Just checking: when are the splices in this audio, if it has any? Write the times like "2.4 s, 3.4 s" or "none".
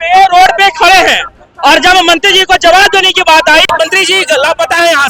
none